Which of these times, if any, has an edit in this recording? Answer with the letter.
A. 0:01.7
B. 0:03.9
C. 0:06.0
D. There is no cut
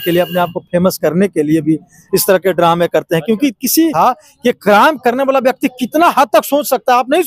B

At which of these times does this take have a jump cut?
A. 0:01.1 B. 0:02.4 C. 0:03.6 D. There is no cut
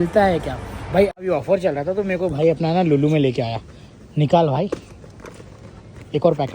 A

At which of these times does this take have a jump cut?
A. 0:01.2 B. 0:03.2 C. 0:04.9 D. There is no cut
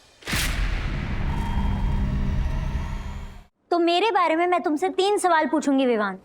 B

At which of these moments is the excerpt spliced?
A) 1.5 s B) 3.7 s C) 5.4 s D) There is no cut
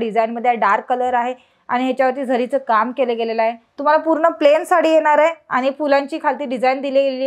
B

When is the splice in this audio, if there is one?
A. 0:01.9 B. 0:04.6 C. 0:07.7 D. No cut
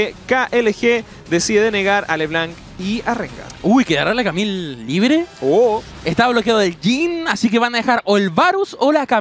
B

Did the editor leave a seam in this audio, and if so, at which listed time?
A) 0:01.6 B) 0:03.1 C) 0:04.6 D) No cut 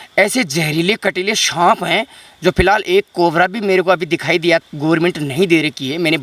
C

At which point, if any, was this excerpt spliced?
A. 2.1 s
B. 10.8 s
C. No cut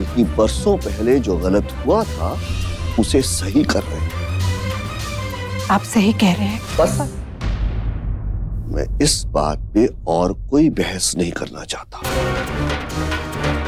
C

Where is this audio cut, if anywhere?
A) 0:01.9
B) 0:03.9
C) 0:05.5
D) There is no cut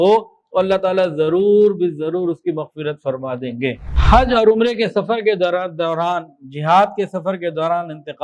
B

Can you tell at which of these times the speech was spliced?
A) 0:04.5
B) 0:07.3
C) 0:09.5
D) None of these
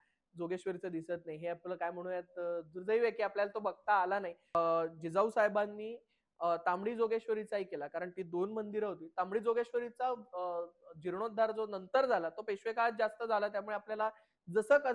A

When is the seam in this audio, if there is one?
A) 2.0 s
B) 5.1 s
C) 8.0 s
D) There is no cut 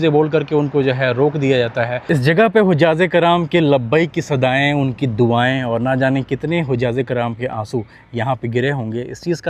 A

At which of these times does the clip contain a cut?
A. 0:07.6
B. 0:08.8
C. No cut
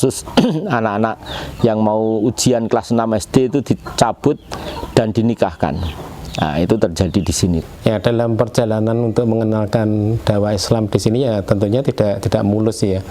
A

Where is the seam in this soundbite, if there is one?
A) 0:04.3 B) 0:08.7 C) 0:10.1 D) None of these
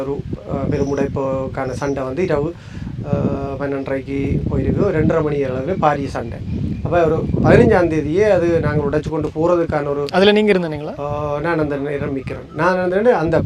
D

